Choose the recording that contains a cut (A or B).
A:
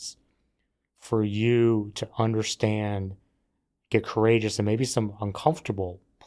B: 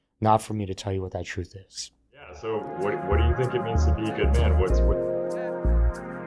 B